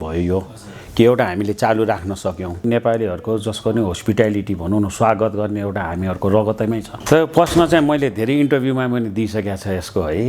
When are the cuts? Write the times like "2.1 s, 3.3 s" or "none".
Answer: 2.6 s, 6.9 s